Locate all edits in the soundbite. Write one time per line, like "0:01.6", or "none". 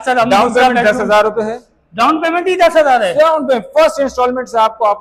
none

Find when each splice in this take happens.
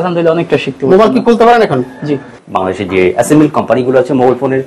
0:02.3

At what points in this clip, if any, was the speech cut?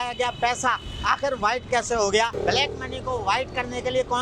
none

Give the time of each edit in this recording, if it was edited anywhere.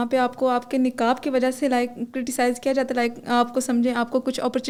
none

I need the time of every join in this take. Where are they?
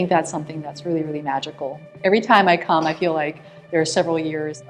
0:01.9

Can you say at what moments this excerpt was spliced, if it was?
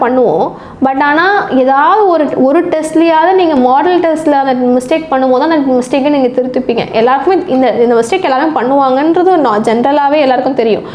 none

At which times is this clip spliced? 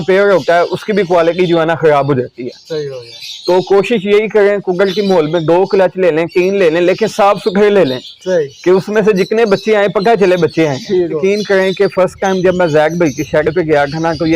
0:11.2

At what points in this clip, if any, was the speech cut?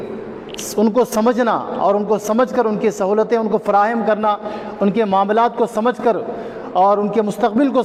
none

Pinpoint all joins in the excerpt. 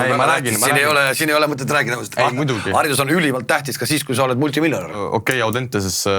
0:05.0

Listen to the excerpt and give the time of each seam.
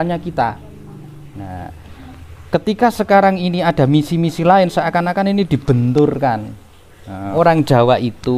0:07.2

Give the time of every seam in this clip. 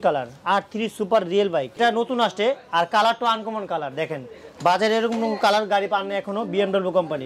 0:01.8

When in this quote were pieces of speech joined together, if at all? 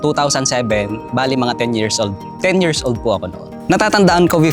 0:03.5

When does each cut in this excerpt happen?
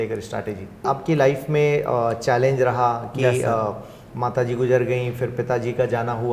0:00.9

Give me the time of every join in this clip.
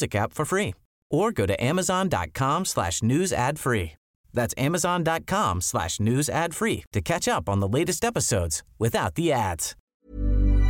0:09.7

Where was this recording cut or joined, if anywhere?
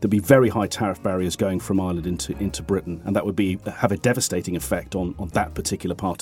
none

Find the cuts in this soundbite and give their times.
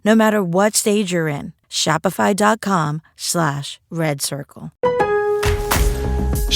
0:04.6

